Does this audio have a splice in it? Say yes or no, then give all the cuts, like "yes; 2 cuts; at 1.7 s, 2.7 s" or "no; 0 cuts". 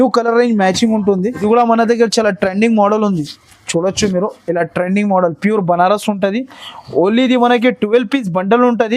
yes; 1 cut; at 1.4 s